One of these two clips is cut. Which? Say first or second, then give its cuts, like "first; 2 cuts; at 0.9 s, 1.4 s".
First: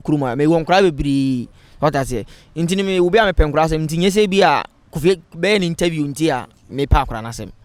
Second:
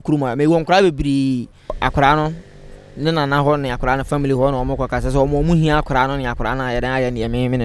second; 1 cut; at 1.8 s